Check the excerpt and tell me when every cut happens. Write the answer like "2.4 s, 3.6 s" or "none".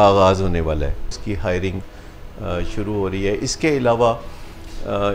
1.2 s